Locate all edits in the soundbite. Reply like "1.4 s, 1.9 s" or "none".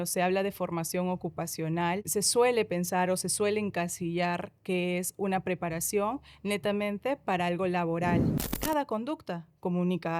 2.0 s, 8.5 s